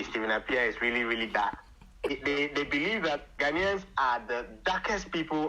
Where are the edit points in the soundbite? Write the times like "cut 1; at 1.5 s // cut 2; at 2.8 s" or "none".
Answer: cut 1; at 2.1 s // cut 2; at 3.3 s